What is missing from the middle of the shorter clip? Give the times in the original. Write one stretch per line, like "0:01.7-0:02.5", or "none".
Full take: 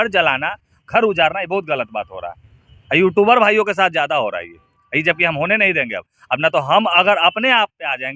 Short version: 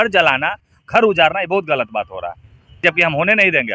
0:02.8-0:05.0